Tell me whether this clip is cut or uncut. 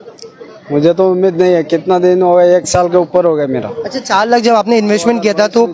uncut